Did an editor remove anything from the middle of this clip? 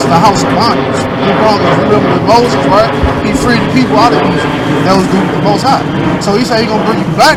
no; 0 cuts

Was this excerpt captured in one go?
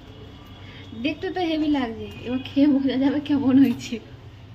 yes; 0 cuts

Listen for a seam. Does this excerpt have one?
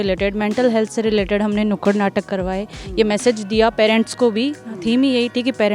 no; 0 cuts

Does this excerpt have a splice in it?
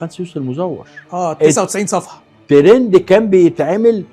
yes; 1 cut; at 0.9 s

